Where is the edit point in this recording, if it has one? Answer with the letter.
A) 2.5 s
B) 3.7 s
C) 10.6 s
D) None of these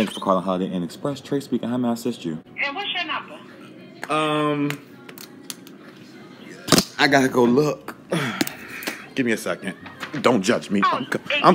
A